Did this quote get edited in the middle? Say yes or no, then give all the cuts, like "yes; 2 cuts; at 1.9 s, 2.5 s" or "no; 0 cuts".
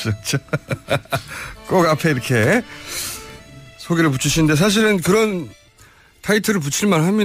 no; 0 cuts